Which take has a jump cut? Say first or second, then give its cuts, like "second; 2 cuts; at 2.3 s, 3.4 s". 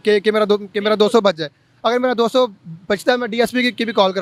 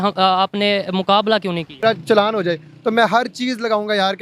second; 1 cut; at 1.8 s